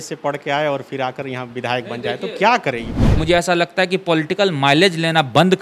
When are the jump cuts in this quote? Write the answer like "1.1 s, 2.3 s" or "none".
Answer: 3.0 s